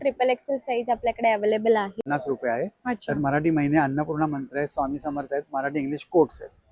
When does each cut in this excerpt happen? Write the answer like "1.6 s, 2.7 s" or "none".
2.0 s